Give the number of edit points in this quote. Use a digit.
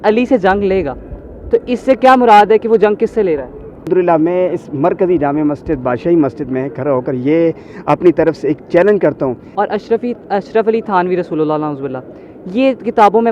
2